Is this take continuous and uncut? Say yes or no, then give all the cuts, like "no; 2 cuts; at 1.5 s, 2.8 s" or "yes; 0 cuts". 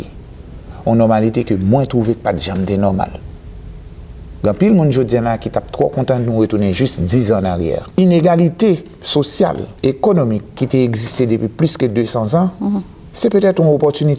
no; 3 cuts; at 7.8 s, 9.7 s, 10.6 s